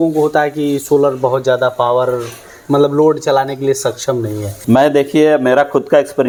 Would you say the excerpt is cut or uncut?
uncut